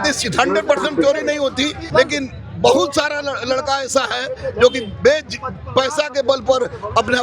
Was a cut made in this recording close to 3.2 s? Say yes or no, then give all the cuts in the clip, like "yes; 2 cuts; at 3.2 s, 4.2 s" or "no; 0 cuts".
no; 1 cut; at 1.8 s